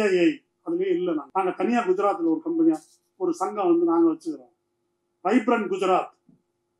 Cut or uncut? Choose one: cut